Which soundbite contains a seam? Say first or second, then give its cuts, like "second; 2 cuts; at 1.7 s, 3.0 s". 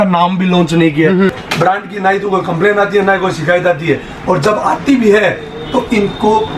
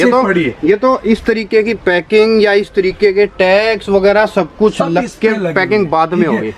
first; 1 cut; at 1.4 s